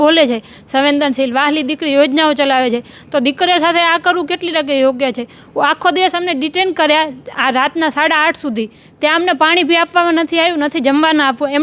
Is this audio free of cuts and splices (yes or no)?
yes